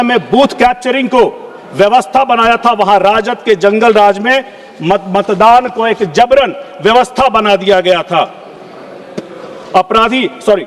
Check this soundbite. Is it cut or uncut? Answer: uncut